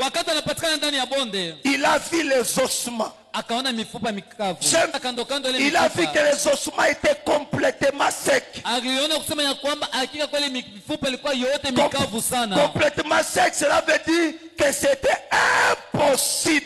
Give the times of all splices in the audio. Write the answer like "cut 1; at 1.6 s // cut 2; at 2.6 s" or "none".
cut 1; at 4.9 s